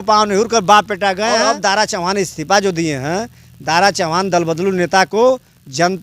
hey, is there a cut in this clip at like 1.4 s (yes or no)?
yes